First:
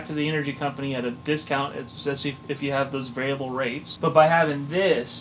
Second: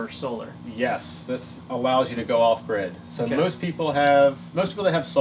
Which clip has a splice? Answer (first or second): first